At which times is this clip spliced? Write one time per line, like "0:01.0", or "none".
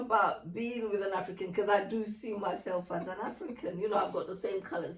none